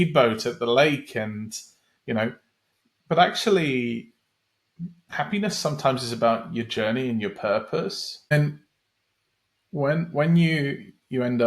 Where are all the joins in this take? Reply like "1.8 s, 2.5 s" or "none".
8.3 s